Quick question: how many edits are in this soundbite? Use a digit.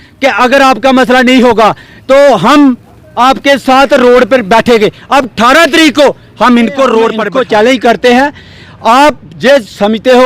1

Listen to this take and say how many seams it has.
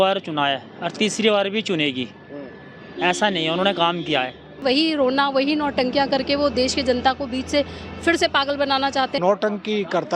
2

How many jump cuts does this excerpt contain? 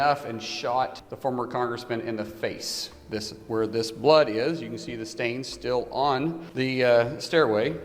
2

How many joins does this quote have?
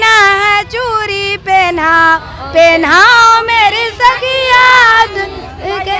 0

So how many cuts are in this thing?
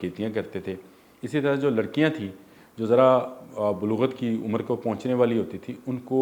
0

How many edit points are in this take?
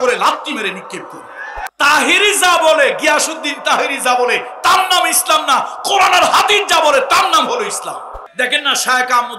2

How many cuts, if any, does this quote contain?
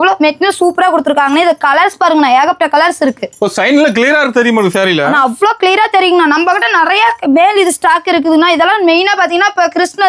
0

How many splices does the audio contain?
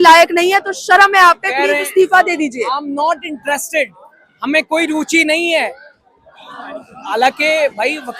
0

